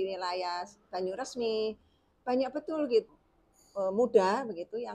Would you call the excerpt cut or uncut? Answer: cut